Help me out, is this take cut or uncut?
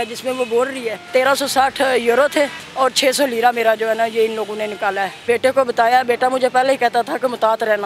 cut